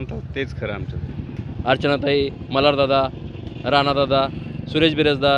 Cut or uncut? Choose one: cut